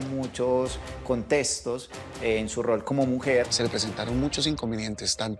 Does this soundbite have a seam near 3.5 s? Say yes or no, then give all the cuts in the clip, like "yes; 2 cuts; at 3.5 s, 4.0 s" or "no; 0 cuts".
yes; 1 cut; at 3.5 s